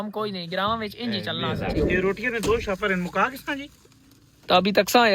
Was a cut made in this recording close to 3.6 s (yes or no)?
no